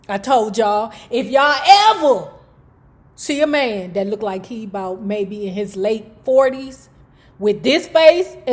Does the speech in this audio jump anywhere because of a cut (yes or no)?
no